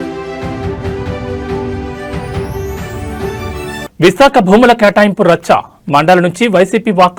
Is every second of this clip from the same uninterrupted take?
yes; 0 cuts

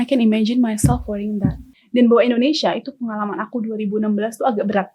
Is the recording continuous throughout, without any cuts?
no; 1 cut; at 1.7 s

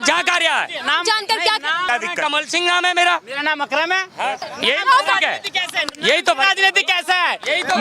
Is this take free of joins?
no; 2 cuts; at 1.9 s, 4.5 s

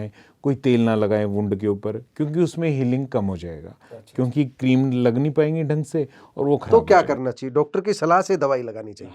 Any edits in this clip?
no; 0 cuts

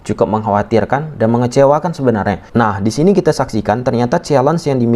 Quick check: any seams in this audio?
yes; 1 cut; at 2.4 s

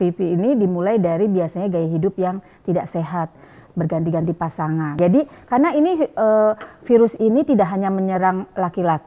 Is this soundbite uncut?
no; 1 cut; at 4.9 s

